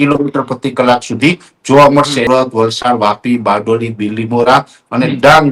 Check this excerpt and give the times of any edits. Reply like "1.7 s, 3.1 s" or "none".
2.3 s